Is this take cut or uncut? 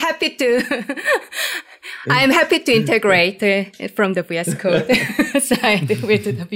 uncut